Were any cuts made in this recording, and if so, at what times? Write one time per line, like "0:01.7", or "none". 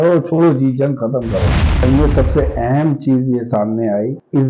0:01.8